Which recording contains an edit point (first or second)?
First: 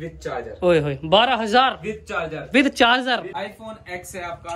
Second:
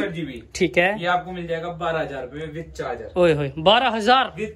first